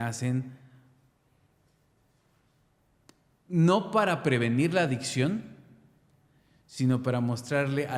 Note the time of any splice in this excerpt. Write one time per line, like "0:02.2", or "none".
none